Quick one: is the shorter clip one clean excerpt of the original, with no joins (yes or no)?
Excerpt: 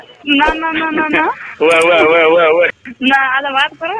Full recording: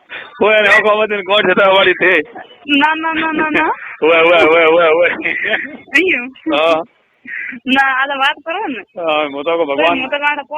no